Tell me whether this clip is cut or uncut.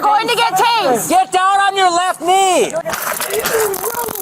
cut